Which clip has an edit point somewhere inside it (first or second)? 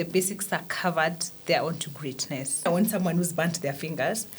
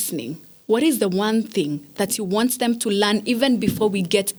first